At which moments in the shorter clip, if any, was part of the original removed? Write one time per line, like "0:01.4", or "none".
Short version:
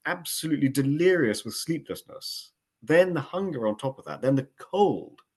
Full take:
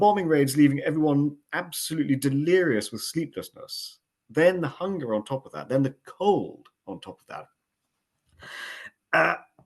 none